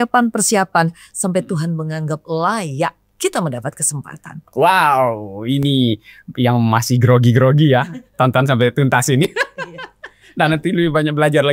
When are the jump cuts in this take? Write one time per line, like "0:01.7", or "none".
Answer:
none

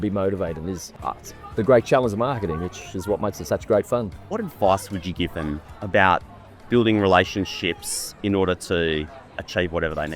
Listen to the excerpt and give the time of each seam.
0:04.1

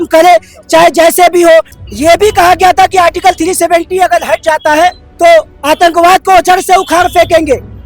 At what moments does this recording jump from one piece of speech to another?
0:01.7
0:05.1

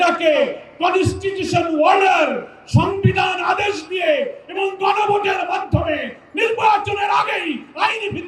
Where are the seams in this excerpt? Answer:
none

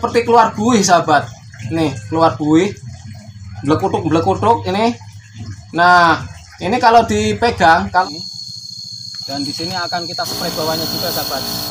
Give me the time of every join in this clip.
0:08.0

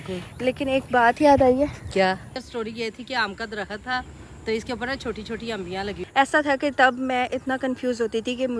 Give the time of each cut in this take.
0:02.3
0:06.0

